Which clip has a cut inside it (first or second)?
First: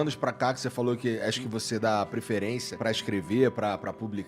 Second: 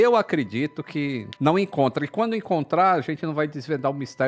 first